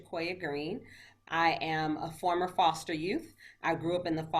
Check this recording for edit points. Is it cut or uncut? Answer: cut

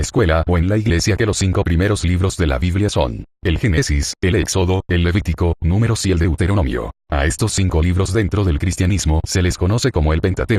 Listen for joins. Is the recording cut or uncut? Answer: cut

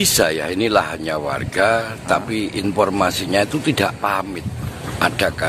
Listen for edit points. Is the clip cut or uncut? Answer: cut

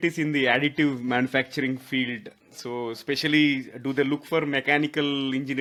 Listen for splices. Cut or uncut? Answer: uncut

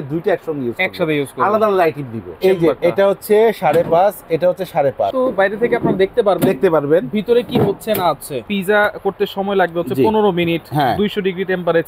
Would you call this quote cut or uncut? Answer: cut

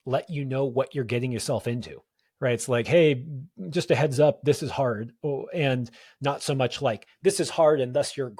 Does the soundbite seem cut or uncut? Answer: uncut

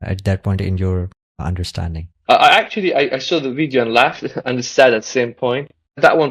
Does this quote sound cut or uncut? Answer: uncut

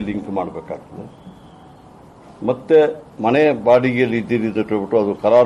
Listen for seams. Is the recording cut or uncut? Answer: uncut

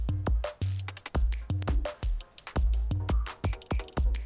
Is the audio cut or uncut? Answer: cut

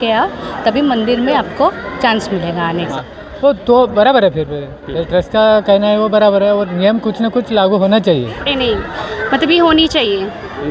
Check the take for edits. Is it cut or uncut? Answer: cut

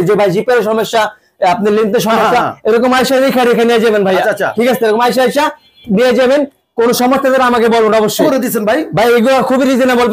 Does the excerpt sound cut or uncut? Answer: uncut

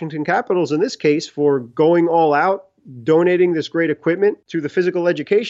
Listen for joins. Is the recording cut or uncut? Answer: cut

